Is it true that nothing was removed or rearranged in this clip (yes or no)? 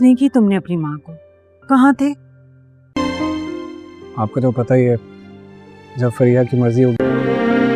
yes